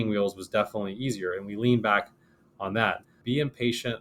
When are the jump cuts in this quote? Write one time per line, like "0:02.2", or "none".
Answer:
0:03.0